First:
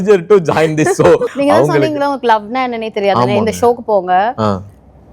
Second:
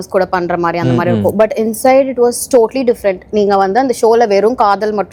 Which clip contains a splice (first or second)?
first